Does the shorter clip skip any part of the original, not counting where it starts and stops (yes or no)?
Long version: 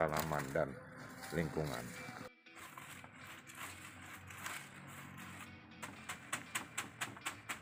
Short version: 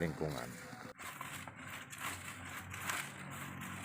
yes